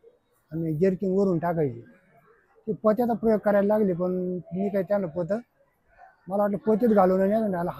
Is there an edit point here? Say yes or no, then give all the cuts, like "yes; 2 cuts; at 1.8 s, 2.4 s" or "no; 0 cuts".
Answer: no; 0 cuts